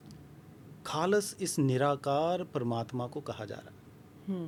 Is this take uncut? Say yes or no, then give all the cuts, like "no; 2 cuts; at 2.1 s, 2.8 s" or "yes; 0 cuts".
yes; 0 cuts